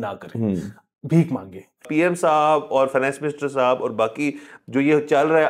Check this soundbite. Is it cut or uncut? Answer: cut